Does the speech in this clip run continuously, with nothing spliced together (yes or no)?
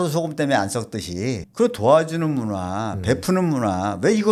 no